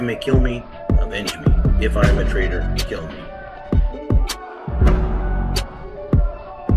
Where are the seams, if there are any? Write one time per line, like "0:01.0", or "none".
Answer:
0:03.4